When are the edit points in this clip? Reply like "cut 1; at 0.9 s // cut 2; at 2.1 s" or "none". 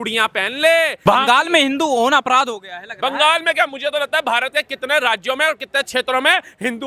cut 1; at 1.0 s